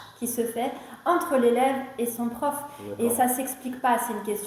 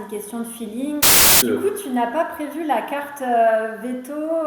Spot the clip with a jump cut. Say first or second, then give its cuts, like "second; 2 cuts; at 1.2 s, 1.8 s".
second; 1 cut; at 1.3 s